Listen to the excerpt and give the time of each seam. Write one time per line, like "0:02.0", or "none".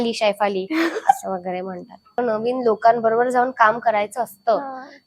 0:02.2